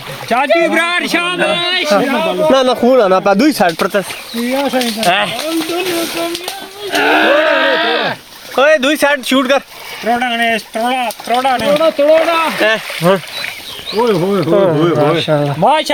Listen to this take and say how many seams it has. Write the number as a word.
zero